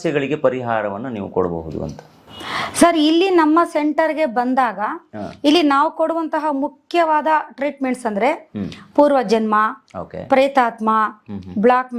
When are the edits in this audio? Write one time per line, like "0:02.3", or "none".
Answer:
none